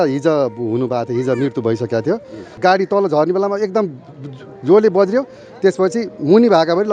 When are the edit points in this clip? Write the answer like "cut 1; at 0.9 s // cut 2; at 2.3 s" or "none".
cut 1; at 2.5 s